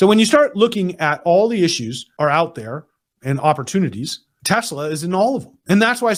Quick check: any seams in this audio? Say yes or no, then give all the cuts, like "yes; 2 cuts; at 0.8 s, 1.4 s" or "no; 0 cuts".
no; 0 cuts